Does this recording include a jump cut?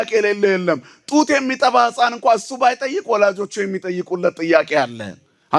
no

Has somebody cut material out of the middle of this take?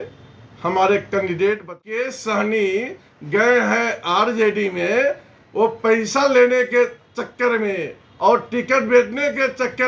yes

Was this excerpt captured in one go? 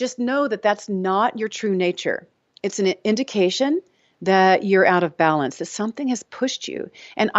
yes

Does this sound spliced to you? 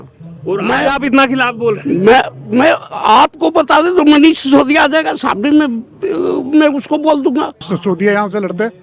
yes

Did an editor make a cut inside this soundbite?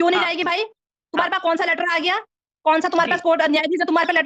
no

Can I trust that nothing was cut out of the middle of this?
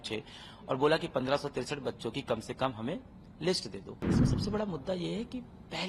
no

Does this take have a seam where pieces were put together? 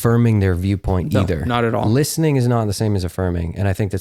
no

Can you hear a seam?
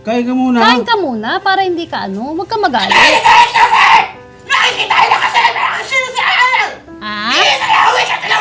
no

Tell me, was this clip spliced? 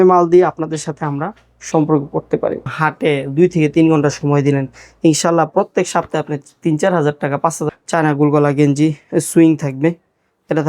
yes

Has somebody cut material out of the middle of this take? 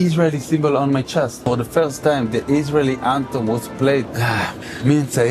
yes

